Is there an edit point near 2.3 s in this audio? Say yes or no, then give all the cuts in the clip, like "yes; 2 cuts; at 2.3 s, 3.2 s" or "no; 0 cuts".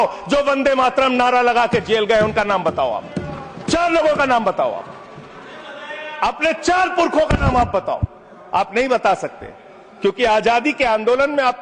no; 0 cuts